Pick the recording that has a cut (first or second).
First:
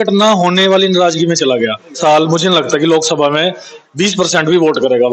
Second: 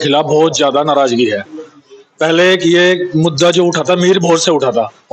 first